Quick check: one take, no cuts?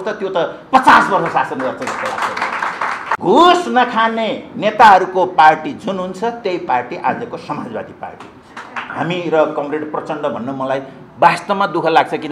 no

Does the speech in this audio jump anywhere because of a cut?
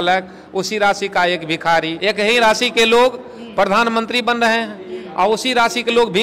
yes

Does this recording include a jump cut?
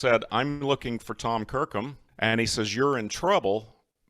yes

